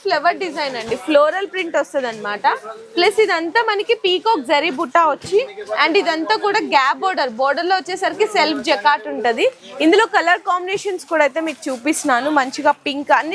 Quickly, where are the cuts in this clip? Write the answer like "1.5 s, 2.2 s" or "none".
none